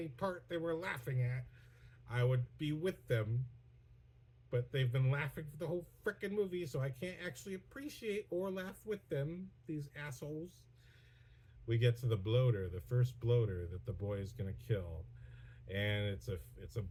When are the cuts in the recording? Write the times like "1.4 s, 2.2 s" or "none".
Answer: none